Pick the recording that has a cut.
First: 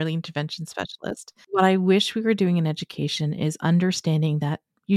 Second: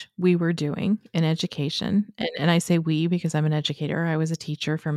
first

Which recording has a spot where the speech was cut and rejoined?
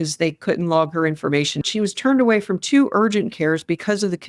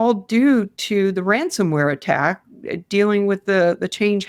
first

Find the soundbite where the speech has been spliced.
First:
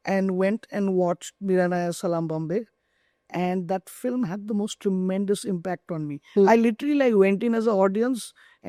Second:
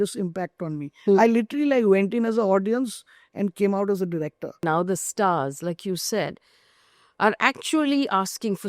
second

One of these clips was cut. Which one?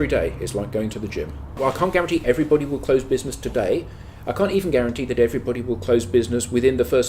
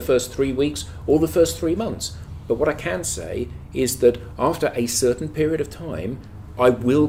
first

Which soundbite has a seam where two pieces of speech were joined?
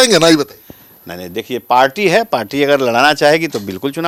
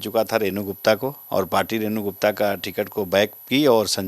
second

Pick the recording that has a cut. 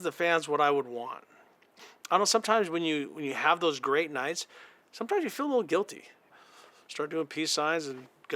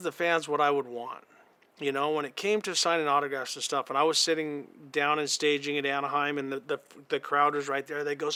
first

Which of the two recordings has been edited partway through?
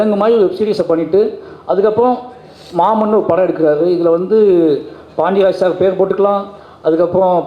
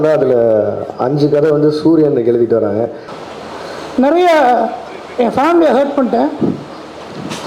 second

